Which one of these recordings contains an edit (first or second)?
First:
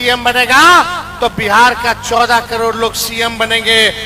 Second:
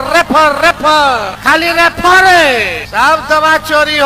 second